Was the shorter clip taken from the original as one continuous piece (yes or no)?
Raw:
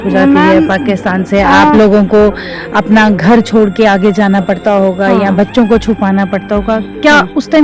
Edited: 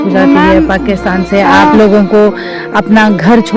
yes